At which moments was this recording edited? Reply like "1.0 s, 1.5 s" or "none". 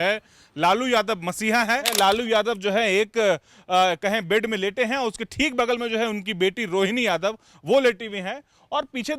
1.9 s

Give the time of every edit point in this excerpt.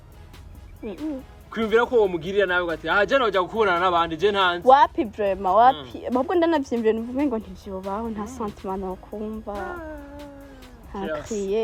none

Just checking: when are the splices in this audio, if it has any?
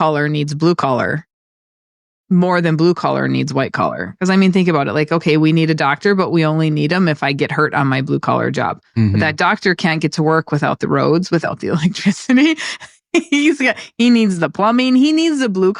none

